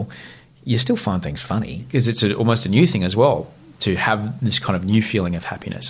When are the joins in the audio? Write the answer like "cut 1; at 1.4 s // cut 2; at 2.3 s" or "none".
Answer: cut 1; at 1.8 s